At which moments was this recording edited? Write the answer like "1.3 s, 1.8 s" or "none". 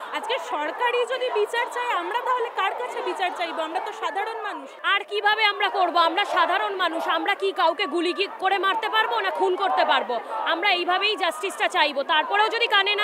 4.8 s